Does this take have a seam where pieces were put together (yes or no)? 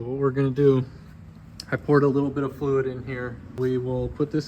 yes